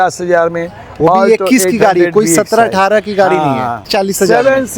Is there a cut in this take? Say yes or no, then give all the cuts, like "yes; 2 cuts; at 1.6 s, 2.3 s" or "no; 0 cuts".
yes; 1 cut; at 3.9 s